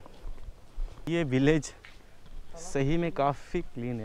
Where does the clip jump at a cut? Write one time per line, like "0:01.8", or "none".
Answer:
0:01.1